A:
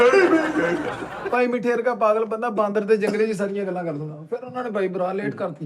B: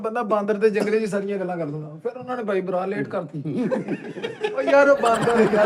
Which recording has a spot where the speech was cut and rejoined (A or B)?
A